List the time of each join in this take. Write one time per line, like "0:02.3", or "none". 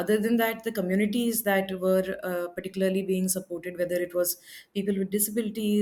none